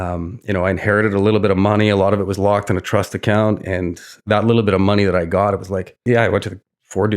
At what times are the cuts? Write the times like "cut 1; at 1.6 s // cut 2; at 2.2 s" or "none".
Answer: cut 1; at 6.0 s